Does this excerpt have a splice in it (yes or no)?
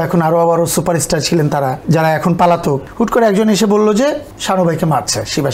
yes